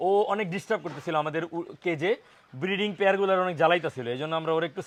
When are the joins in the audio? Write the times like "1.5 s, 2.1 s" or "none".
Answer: none